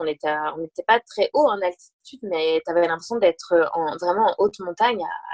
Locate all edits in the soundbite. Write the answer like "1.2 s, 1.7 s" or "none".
none